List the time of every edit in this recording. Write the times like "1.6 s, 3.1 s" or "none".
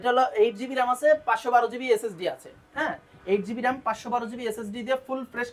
none